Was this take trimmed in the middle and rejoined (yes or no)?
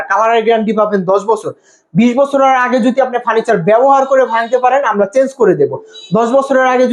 no